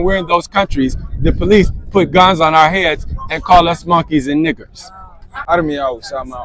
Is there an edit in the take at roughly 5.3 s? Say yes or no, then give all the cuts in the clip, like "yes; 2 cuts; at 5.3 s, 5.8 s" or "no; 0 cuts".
yes; 1 cut; at 5.3 s